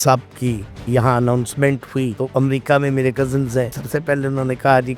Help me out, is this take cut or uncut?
cut